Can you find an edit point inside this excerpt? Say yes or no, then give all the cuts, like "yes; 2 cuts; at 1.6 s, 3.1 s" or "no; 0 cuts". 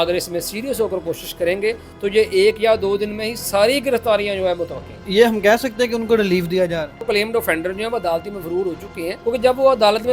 yes; 3 cuts; at 5.0 s, 7.0 s, 9.2 s